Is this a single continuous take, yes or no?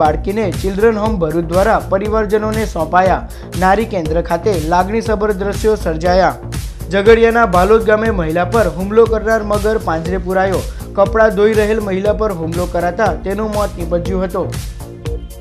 yes